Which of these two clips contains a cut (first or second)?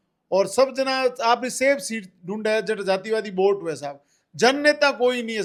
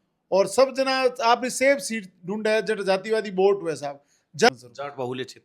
second